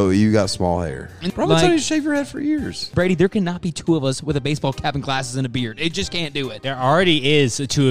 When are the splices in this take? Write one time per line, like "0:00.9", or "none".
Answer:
0:01.1
0:02.8
0:06.6